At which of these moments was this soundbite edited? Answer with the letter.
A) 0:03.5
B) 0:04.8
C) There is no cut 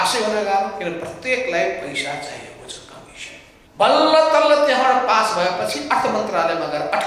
A